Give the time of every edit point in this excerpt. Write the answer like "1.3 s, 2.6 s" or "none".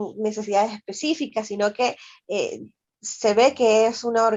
none